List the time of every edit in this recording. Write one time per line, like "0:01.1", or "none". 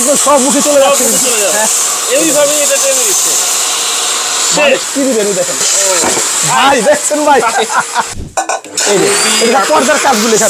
0:04.8
0:08.1

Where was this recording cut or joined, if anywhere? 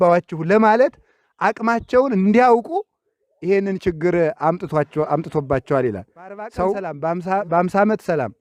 0:06.9

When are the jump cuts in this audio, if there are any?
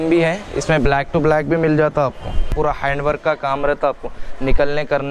0:02.5

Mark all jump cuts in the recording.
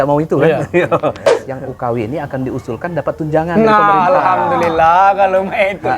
0:01.4

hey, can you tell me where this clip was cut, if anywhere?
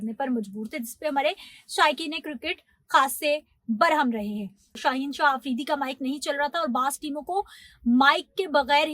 0:04.7

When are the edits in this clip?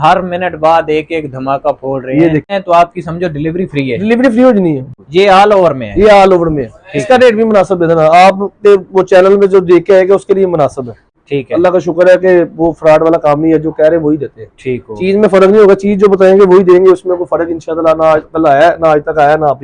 0:02.5
0:04.9
0:11.2

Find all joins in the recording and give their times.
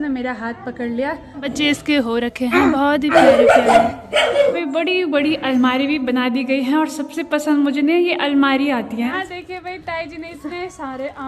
0:01.5
0:04.6
0:09.2

